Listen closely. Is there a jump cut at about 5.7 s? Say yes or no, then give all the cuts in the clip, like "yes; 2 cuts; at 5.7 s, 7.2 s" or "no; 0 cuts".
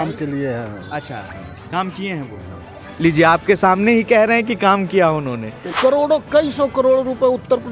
yes; 1 cut; at 5.7 s